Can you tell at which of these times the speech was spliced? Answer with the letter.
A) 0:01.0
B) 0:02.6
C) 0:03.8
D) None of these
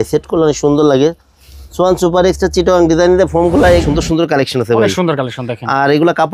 C